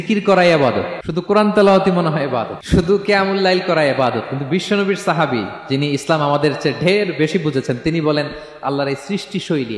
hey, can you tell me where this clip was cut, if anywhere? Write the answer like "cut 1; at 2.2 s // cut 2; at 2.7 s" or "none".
cut 1; at 1.0 s // cut 2; at 2.5 s